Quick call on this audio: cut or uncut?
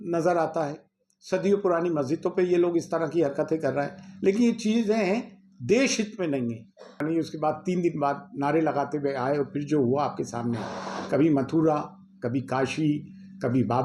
cut